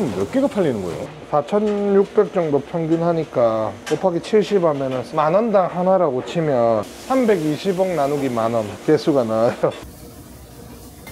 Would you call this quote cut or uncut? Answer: cut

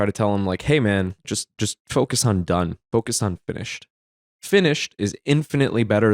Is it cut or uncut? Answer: cut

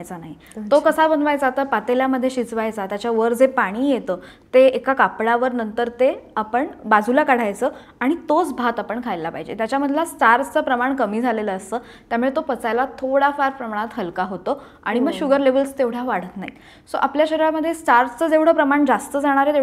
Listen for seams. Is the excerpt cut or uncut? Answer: uncut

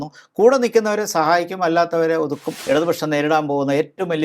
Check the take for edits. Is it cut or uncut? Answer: cut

